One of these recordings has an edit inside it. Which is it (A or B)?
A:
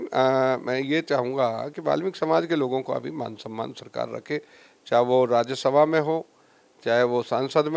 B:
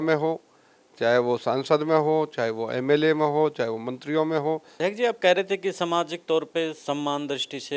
B